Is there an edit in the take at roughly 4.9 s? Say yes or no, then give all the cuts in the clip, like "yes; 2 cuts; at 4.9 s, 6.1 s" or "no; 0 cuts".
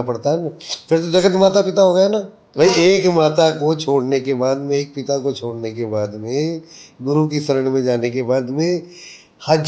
no; 1 cut; at 2.4 s